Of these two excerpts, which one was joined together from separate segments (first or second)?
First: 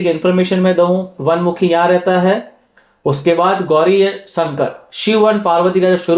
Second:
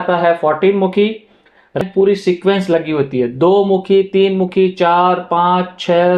second